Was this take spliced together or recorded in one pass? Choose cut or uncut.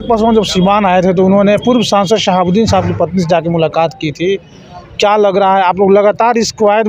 uncut